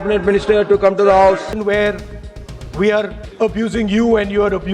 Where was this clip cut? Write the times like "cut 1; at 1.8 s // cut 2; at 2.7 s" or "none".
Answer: cut 1; at 1.5 s // cut 2; at 3.2 s